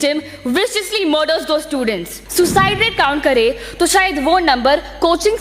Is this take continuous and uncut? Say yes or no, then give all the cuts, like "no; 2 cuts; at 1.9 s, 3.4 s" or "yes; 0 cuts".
no; 1 cut; at 2.1 s